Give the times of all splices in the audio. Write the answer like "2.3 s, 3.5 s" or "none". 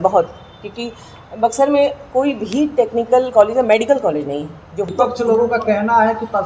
4.9 s